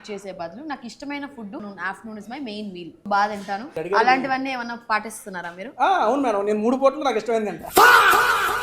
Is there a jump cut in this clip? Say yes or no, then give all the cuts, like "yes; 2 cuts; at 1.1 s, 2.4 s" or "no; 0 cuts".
yes; 3 cuts; at 1.6 s, 3.0 s, 3.8 s